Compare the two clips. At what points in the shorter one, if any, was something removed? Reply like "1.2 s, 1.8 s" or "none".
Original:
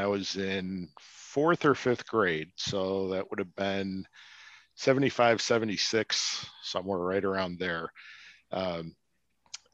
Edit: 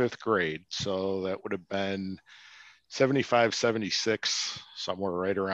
none